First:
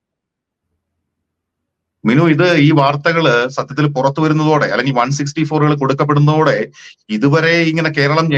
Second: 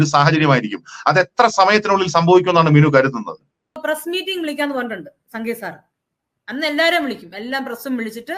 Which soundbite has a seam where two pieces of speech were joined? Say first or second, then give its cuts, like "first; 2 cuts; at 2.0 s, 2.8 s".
second; 1 cut; at 3.8 s